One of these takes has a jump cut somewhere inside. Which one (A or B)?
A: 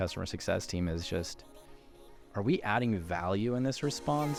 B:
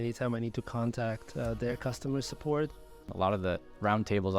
B